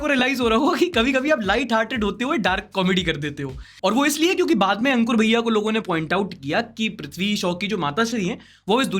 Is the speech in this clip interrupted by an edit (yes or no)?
no